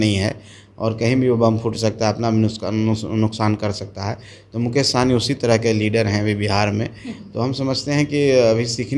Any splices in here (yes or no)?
no